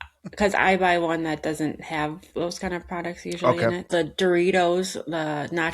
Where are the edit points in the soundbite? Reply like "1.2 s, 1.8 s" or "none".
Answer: 3.9 s